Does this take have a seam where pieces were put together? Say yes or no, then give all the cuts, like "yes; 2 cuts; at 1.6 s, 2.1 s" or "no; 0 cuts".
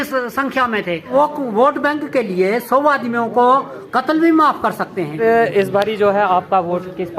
yes; 2 cuts; at 1.1 s, 5.2 s